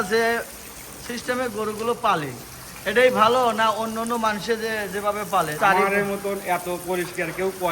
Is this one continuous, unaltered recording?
no; 1 cut; at 5.5 s

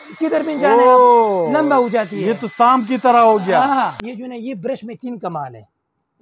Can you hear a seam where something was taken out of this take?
yes; 1 cut; at 4.0 s

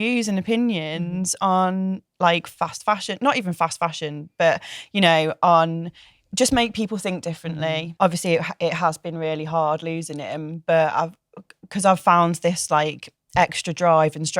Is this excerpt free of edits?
no; 1 cut; at 7.9 s

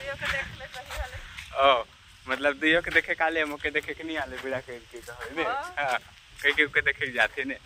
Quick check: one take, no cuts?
yes; 0 cuts

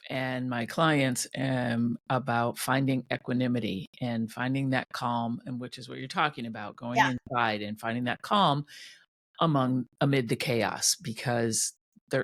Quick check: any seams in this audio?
no; 0 cuts

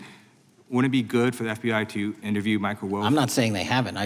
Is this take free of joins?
yes; 0 cuts

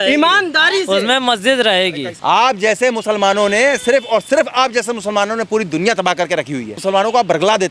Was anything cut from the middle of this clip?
yes; 2 cuts; at 2.1 s, 6.8 s

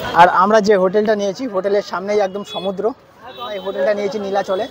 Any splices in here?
yes; 1 cut; at 3.7 s

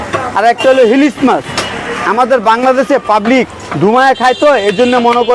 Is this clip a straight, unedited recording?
yes; 0 cuts

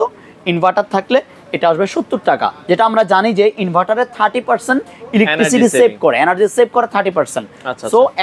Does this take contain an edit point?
no; 0 cuts

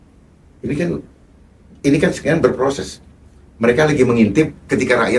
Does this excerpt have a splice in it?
no; 0 cuts

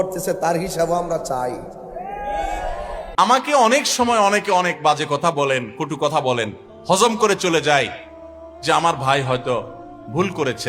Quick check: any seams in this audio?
yes; 1 cut; at 3.1 s

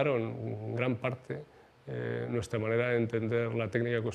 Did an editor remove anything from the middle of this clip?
no; 0 cuts

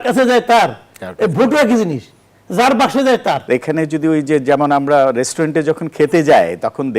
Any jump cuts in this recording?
yes; 1 cut; at 3.4 s

